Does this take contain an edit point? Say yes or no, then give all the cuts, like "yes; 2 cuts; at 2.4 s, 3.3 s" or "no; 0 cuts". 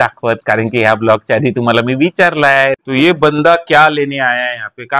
yes; 1 cut; at 2.8 s